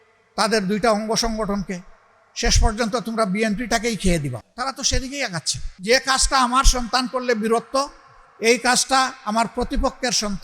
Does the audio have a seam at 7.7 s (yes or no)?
no